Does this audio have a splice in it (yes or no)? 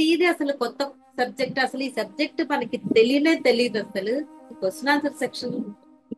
yes